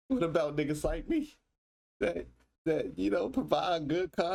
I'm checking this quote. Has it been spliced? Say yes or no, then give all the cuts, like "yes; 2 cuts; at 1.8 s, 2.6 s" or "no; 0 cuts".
no; 0 cuts